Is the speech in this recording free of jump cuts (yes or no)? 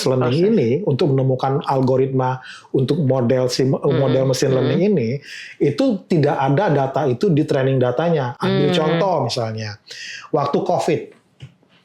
yes